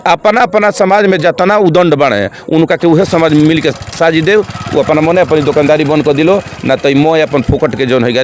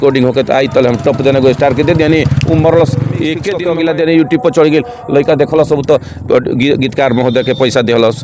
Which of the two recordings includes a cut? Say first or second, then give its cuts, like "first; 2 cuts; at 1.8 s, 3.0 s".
second; 1 cut; at 3.5 s